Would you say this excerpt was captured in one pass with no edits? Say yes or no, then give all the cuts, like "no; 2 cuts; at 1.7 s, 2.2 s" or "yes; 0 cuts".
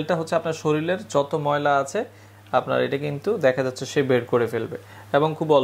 yes; 0 cuts